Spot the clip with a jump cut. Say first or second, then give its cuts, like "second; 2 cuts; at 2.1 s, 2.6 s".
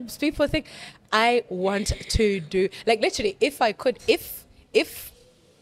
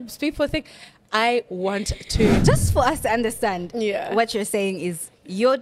second; 1 cut; at 2.4 s